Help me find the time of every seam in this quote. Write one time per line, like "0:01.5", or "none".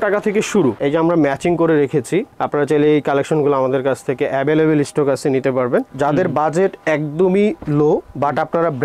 0:00.8
0:05.9